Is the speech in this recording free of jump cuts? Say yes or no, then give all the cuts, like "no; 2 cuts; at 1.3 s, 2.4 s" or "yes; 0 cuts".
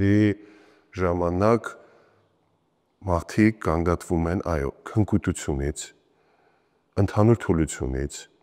yes; 0 cuts